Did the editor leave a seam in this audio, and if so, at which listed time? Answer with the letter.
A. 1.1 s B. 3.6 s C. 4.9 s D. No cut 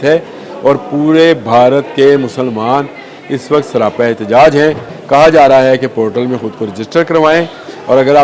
C